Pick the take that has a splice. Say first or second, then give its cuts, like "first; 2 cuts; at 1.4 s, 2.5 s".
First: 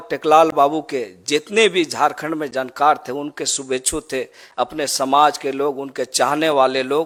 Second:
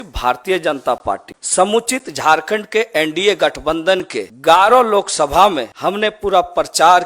second; 3 cuts; at 1.3 s, 4.2 s, 5.7 s